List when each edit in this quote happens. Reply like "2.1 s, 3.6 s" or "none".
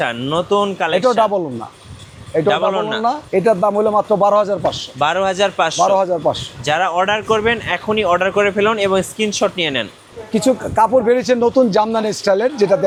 none